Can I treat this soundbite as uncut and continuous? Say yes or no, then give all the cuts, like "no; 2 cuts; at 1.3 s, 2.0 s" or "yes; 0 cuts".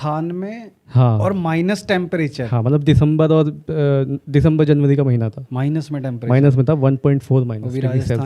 yes; 0 cuts